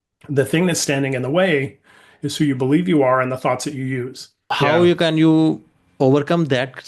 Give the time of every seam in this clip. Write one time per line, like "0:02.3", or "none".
0:04.5